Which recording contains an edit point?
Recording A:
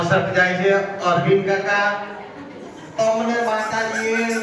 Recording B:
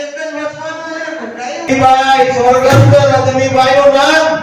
B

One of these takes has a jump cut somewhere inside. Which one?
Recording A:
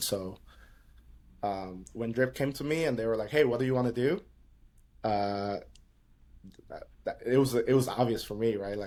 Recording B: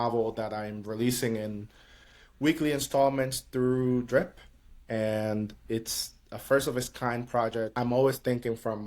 B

